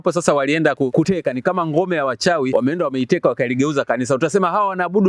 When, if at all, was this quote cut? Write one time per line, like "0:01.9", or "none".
0:01.0
0:02.5